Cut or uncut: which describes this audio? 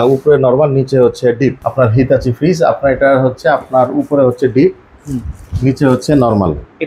cut